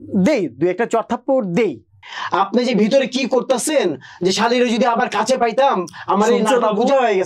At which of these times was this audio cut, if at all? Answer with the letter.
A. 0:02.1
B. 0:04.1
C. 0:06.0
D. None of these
A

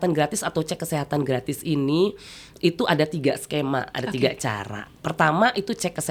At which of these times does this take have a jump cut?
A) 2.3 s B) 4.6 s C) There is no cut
C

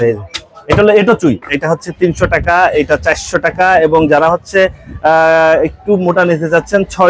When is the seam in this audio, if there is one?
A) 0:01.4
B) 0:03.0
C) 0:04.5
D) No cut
A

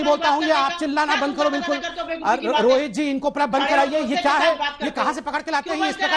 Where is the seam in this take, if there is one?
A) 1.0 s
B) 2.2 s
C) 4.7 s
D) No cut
B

